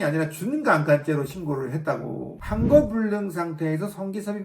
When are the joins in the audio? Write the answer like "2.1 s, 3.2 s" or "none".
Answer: 2.4 s